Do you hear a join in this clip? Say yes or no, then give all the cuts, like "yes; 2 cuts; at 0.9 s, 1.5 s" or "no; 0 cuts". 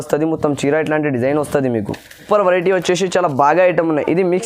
yes; 1 cut; at 2.2 s